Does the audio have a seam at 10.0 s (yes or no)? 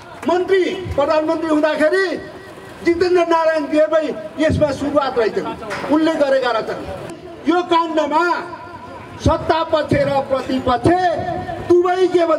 no